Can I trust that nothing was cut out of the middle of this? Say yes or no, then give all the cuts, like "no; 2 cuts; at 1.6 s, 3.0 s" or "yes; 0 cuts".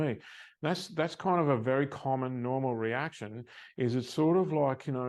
yes; 0 cuts